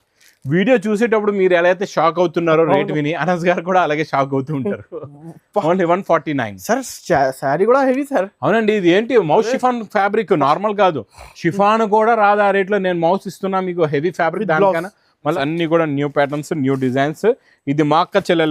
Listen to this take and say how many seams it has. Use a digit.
1